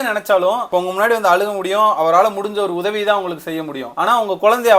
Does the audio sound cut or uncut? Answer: uncut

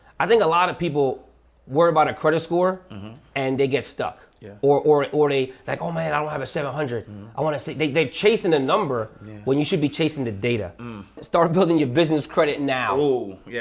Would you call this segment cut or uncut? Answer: cut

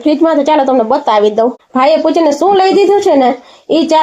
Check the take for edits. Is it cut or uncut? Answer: cut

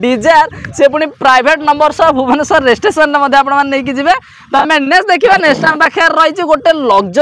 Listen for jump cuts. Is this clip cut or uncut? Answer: uncut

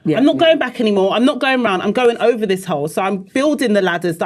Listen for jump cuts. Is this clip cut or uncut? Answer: uncut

